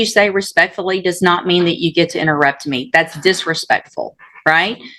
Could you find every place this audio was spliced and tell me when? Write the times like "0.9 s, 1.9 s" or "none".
none